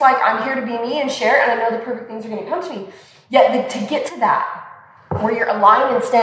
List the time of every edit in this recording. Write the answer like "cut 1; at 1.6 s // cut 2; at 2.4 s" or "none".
none

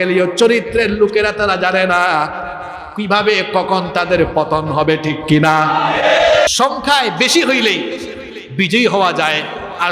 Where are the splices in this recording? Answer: cut 1; at 6.5 s

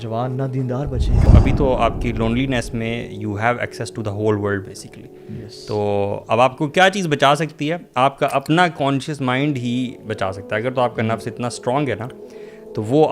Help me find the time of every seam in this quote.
cut 1; at 1.3 s

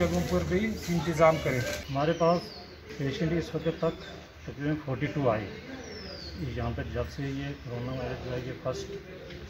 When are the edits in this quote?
cut 1; at 1.8 s

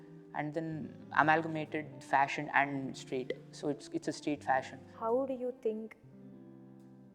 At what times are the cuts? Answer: cut 1; at 4.9 s

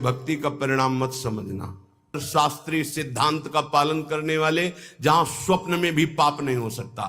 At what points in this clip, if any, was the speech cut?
cut 1; at 2.2 s

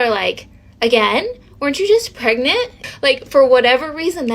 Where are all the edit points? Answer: cut 1; at 2.8 s

